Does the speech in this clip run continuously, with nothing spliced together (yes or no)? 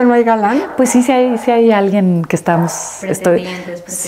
yes